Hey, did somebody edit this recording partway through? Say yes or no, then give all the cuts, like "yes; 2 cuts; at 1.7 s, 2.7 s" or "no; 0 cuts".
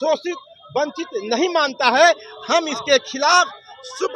no; 0 cuts